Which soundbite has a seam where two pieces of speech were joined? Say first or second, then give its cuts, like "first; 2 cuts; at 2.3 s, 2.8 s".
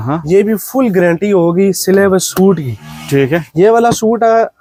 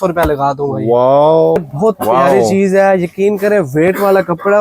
second; 1 cut; at 1.6 s